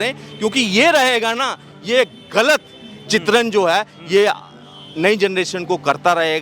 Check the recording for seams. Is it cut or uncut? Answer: uncut